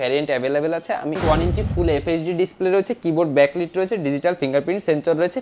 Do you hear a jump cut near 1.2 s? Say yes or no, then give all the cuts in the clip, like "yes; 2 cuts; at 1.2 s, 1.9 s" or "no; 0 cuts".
yes; 1 cut; at 1.2 s